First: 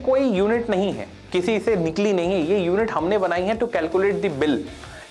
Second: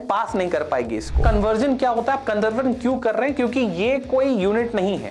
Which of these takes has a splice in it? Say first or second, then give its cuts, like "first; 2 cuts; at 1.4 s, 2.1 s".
second; 1 cut; at 1.2 s